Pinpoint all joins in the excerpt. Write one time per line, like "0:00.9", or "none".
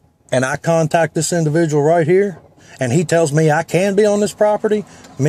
none